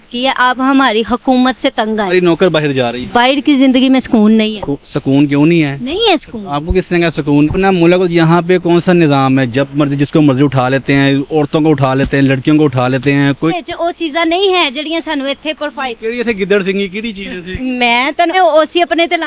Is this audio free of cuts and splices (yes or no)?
no